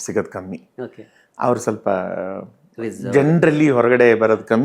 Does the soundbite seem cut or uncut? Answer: uncut